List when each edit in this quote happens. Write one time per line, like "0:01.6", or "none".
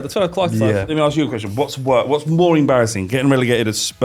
0:00.9